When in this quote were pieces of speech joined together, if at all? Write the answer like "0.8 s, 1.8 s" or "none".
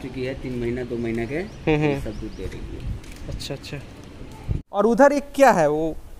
4.8 s